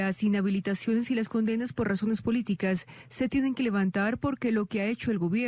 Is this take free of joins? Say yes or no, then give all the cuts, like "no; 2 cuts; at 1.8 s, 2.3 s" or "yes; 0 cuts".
yes; 0 cuts